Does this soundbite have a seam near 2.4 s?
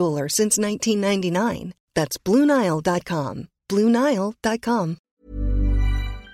no; 1 cut; at 5.1 s

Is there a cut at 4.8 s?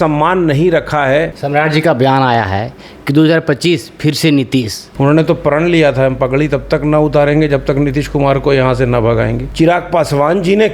yes; 3 cuts; at 1.4 s, 4.8 s, 9.4 s

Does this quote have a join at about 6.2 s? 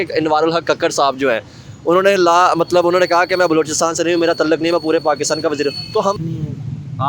yes; 1 cut; at 6.2 s

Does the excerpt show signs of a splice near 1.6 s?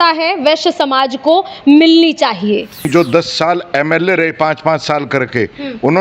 no; 1 cut; at 2.9 s

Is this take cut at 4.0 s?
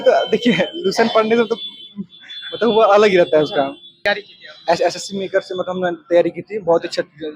yes; 1 cut; at 4.0 s

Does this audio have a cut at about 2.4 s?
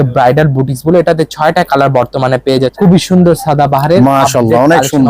yes; 1 cut; at 2.4 s

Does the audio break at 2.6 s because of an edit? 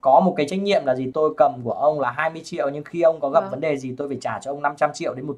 no; 1 cut; at 1.1 s

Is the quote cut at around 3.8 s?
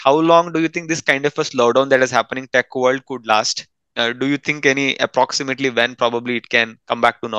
no; 0 cuts

